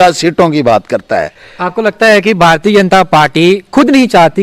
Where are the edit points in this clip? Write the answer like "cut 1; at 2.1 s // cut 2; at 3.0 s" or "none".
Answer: none